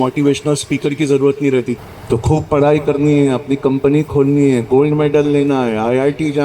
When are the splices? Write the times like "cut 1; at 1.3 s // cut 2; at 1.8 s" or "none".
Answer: cut 1; at 1.8 s